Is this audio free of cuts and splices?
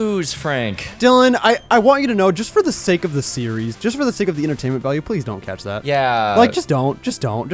no; 2 cuts; at 1.0 s, 5.8 s

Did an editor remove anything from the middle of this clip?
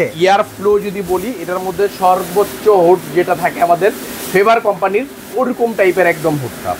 no; 0 cuts

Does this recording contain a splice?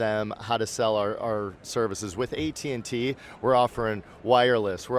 no; 0 cuts

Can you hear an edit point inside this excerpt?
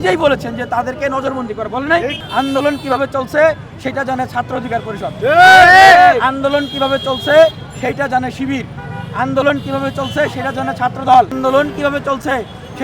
yes; 2 cuts; at 2.2 s, 11.3 s

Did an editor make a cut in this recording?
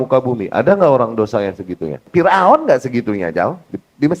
yes; 1 cut; at 2.0 s

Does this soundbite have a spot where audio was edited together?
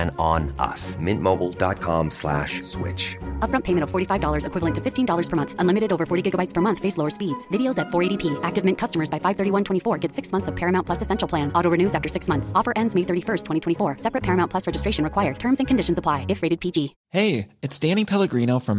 yes; 1 cut; at 17.0 s

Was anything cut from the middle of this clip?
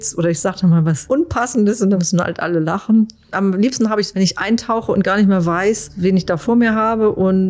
yes; 2 cuts; at 2.0 s, 5.9 s

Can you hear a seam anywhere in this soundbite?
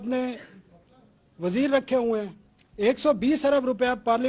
no; 0 cuts

